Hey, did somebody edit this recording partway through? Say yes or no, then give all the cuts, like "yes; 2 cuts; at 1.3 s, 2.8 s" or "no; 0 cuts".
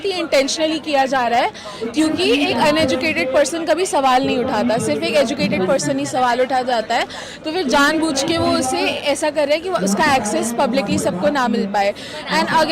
no; 0 cuts